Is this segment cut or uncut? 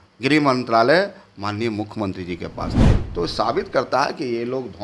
cut